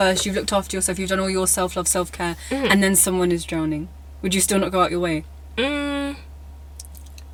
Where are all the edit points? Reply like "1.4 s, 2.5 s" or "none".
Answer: none